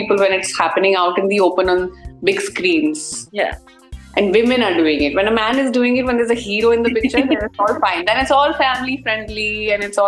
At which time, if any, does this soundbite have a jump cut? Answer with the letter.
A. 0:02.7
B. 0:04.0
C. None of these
C